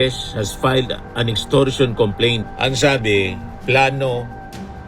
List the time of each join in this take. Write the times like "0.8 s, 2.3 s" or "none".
2.4 s